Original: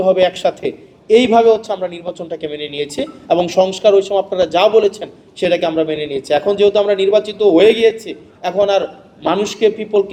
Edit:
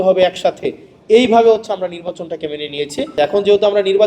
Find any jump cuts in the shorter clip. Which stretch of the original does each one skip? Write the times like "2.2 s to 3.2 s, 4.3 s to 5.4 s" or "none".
3.1 s to 6.2 s